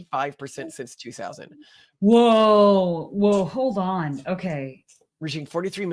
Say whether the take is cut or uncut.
uncut